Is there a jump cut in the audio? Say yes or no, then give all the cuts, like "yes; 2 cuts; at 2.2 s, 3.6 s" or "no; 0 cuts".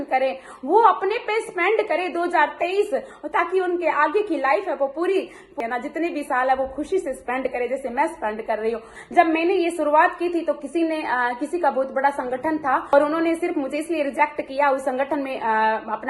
yes; 3 cuts; at 5.5 s, 9.0 s, 12.9 s